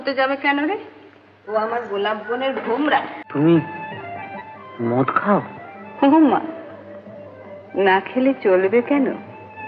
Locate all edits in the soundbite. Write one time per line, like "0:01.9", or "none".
0:03.2